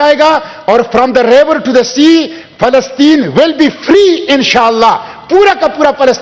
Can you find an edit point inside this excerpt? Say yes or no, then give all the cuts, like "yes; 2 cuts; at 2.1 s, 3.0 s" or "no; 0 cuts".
no; 0 cuts